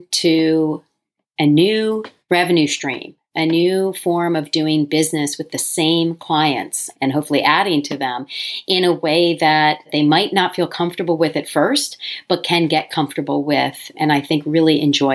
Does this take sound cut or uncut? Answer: cut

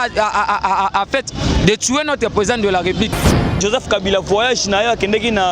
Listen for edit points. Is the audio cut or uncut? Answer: cut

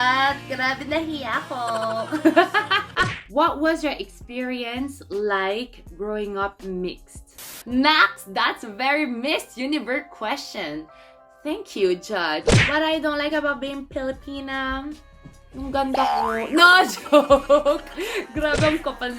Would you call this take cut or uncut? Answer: cut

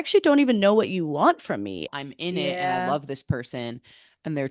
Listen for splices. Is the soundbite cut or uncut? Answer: cut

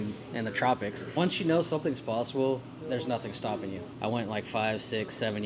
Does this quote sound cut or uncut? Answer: cut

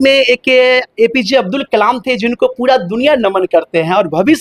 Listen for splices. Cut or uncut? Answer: uncut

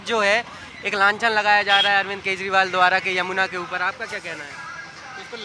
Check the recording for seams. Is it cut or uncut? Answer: uncut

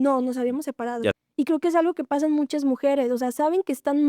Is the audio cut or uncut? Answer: cut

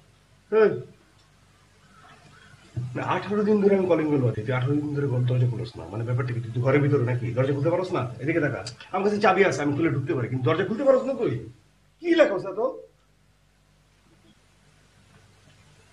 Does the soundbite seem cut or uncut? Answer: uncut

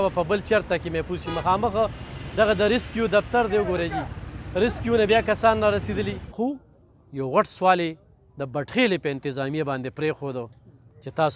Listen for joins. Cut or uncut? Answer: cut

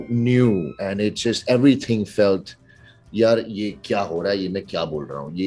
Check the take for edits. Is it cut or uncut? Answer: uncut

